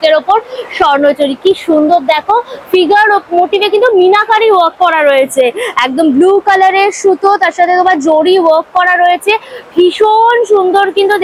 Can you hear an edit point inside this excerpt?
no; 0 cuts

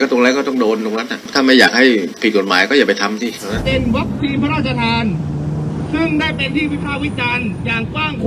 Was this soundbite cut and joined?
yes; 1 cut; at 3.5 s

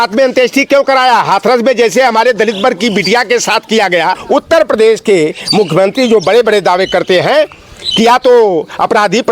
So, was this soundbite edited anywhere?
yes; 1 cut; at 4.2 s

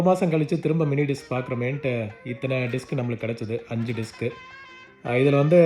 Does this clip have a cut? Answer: no; 0 cuts

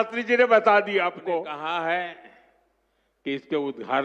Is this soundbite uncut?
no; 1 cut; at 1.5 s

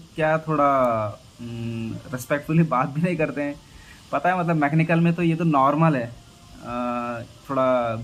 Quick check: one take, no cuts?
yes; 0 cuts

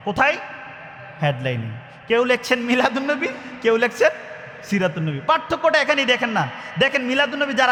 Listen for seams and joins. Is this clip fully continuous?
yes; 0 cuts

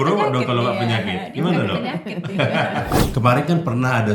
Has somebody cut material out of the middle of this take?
yes; 1 cut; at 3.0 s

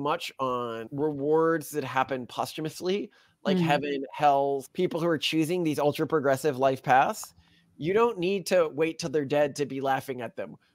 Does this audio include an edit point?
yes; 2 cuts; at 0.9 s, 4.6 s

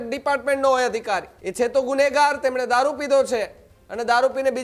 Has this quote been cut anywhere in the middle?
yes; 1 cut; at 1.4 s

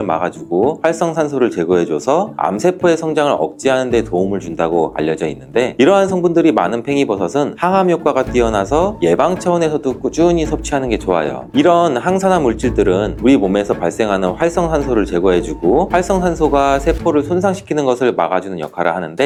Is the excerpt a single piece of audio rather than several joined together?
yes; 0 cuts

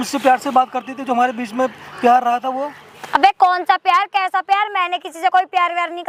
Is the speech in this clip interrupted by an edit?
no; 0 cuts

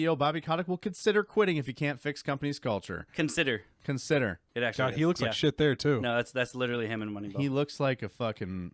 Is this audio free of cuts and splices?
no; 1 cut; at 4.4 s

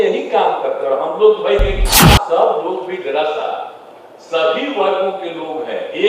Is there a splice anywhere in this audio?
yes; 1 cut; at 2.1 s

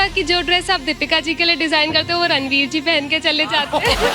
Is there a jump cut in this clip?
no; 0 cuts

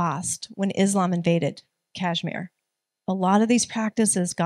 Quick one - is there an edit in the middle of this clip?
no; 0 cuts

